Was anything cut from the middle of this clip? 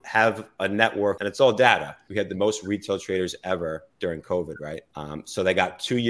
yes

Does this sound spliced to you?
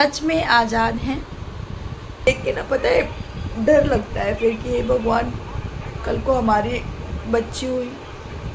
yes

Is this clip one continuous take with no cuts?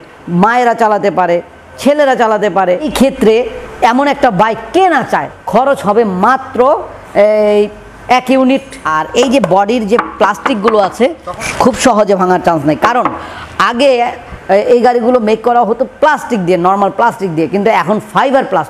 no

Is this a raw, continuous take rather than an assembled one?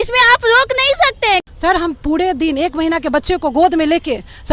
no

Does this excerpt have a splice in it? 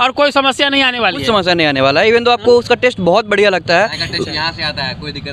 no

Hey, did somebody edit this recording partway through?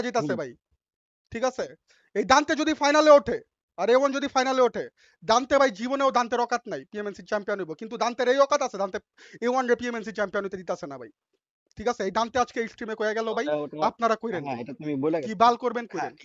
no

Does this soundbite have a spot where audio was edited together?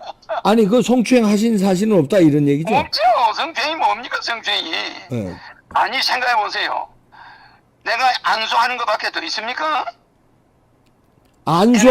yes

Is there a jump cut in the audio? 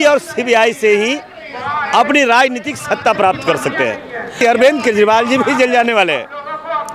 yes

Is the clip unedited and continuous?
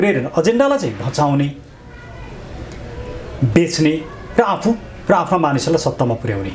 yes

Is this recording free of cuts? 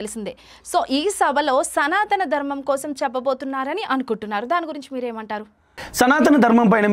yes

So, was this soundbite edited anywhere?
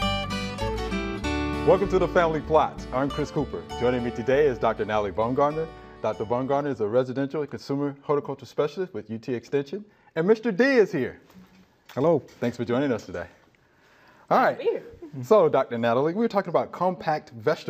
yes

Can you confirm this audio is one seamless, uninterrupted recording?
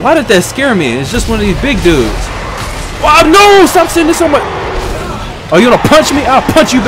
yes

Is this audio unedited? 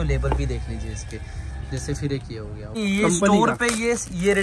no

